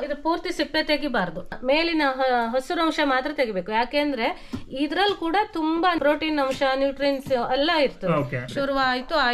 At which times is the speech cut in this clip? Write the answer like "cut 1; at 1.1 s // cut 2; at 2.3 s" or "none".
cut 1; at 1.5 s // cut 2; at 6.0 s // cut 3; at 8.4 s